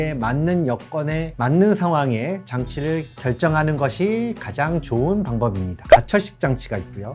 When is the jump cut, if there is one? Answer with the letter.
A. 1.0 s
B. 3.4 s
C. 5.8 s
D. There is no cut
C